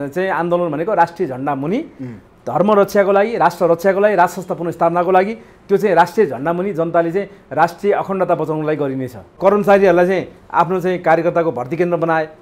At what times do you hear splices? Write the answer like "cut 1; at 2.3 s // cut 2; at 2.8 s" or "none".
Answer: cut 1; at 9.2 s